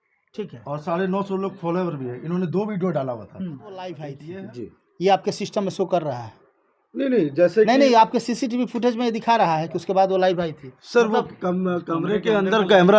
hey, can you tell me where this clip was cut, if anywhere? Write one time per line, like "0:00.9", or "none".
0:04.2